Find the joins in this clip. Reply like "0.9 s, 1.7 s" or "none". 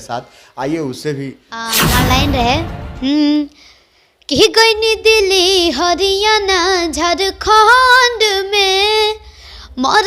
1.7 s

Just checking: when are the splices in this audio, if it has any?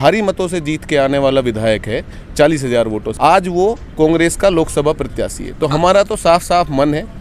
3.1 s

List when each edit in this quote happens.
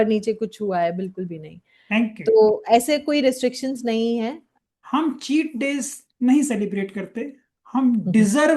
4.5 s

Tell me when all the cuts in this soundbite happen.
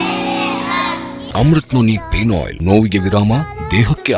1.2 s, 2.5 s

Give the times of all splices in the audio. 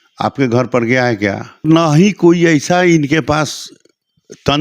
1.6 s

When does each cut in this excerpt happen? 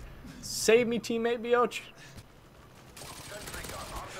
2.2 s

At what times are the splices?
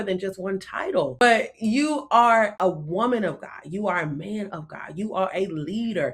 1.2 s, 2.5 s

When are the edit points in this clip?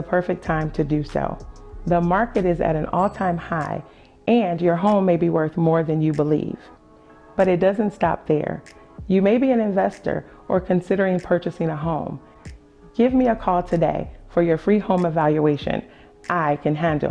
none

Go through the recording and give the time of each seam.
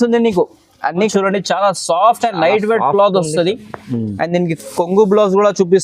1.1 s

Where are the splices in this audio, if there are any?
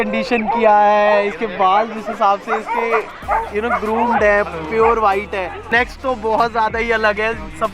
5.7 s

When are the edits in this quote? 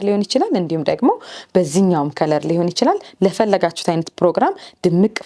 none

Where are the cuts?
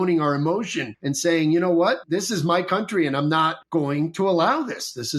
none

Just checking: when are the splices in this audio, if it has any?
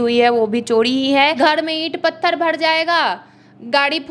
1.3 s

